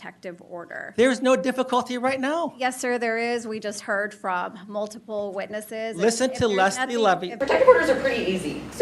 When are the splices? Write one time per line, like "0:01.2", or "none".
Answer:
0:07.3